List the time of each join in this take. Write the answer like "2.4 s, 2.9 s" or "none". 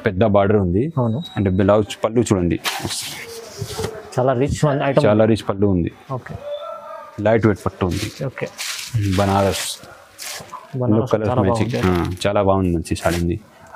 7.0 s